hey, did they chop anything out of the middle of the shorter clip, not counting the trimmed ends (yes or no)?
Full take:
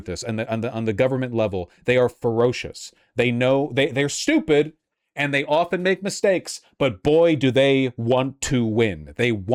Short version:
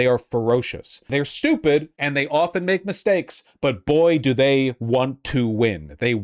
yes